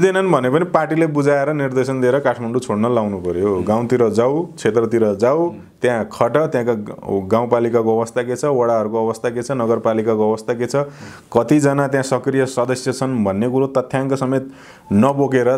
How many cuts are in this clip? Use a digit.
0